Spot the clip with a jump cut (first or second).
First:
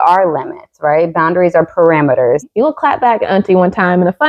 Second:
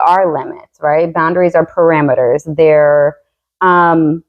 first